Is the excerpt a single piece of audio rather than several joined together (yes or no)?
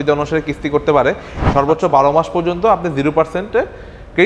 no